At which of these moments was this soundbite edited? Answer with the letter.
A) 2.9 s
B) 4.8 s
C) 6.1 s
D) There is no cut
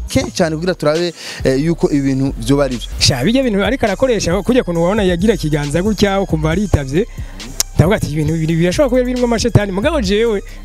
A